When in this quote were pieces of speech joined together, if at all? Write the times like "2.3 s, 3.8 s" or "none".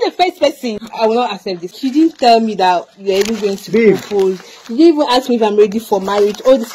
0.8 s, 1.8 s